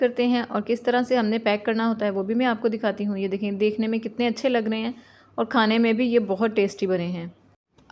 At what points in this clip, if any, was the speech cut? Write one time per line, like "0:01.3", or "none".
none